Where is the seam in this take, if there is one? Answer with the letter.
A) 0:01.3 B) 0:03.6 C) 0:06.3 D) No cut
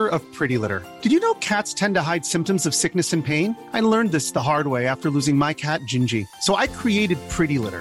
D